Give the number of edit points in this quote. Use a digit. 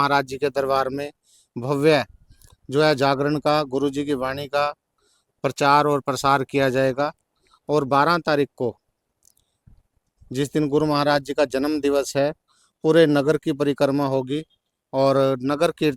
0